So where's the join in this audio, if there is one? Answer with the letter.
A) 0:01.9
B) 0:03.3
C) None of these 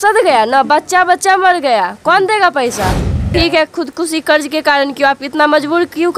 B